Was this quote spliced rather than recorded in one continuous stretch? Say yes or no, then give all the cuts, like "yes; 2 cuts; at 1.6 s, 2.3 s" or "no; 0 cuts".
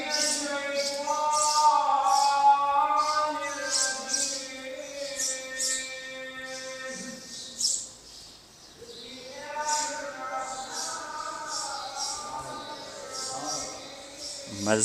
no; 0 cuts